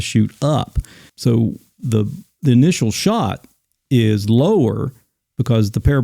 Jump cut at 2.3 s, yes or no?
no